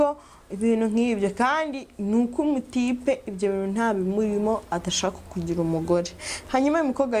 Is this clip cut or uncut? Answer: uncut